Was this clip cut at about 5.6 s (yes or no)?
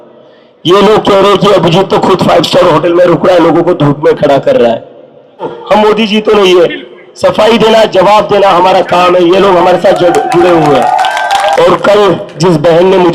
yes